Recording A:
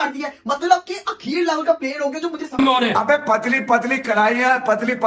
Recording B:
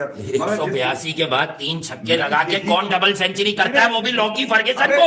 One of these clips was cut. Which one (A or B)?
A